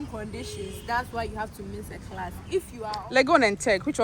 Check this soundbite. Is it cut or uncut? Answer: cut